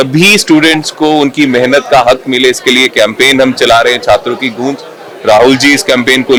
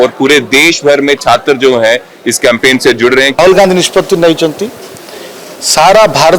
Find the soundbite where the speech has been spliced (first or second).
second